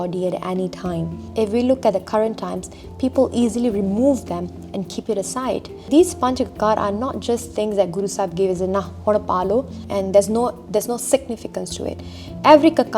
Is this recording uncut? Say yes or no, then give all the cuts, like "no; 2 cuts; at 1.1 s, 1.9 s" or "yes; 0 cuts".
no; 3 cuts; at 1.2 s, 5.9 s, 9.8 s